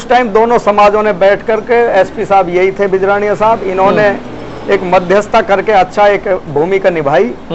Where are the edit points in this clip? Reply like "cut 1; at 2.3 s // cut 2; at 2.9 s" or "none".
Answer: none